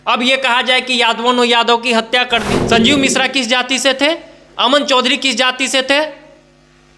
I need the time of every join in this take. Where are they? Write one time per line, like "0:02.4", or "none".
0:02.6